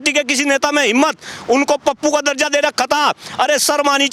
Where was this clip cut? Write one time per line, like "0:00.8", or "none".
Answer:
none

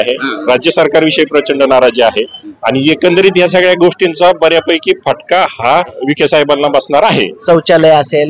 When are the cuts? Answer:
0:06.0
0:07.3

